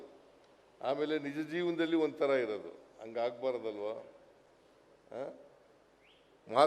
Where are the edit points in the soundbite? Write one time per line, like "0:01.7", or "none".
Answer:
none